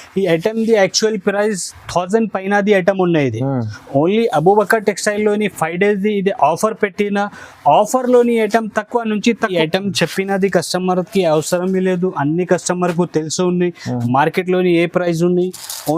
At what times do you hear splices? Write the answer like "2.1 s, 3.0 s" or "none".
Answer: 9.5 s